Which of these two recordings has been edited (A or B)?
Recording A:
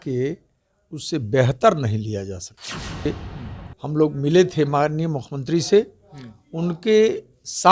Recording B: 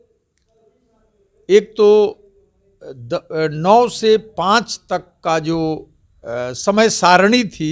A